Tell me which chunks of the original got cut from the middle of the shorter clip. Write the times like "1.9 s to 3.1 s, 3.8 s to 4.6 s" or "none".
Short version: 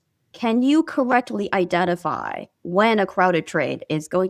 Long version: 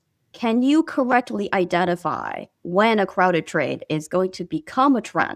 none